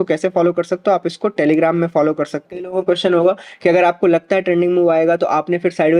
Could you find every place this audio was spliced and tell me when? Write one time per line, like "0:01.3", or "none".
0:02.7